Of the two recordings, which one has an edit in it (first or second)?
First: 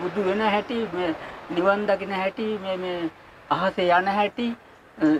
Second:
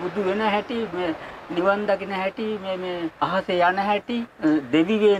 second